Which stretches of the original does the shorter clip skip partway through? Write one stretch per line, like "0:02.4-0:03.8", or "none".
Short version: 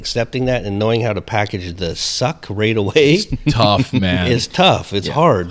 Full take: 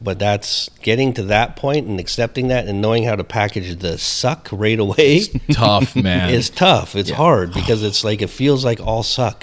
none